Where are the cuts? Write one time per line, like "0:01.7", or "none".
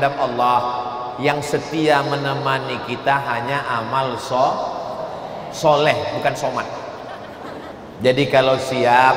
0:07.7